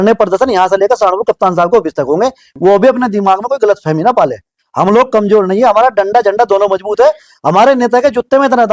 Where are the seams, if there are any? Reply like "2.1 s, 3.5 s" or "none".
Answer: 2.4 s

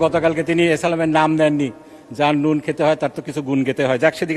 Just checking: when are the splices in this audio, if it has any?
none

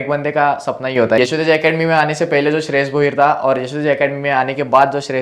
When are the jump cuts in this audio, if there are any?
1.2 s

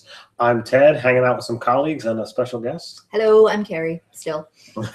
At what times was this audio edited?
3.9 s

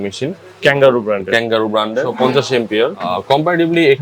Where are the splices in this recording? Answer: 2.1 s, 3.1 s

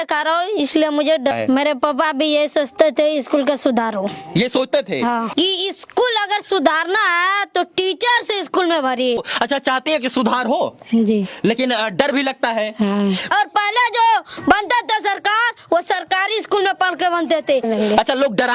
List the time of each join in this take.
1.3 s, 5.3 s, 9.2 s, 13.3 s, 17.7 s

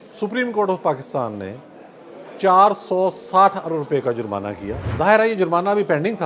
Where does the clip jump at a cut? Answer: 4.8 s

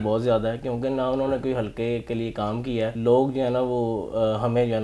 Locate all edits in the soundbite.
2.9 s

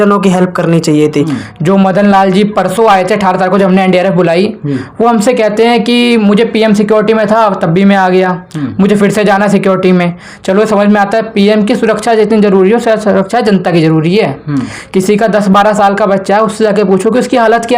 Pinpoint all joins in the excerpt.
1.3 s

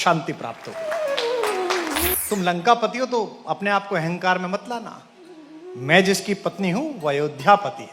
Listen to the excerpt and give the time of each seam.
2.1 s

